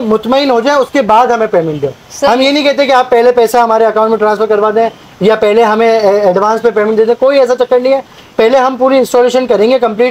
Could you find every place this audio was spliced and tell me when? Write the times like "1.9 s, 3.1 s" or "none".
none